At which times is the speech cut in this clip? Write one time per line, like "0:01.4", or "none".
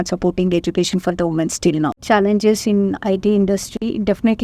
0:02.0